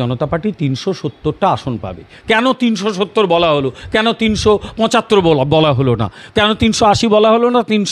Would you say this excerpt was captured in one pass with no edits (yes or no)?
yes